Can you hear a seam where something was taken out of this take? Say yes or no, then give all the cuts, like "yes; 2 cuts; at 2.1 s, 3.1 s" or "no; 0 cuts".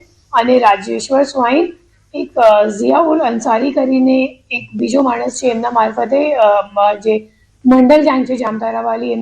no; 0 cuts